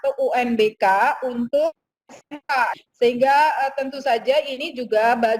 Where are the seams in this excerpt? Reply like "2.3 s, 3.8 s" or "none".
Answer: 2.8 s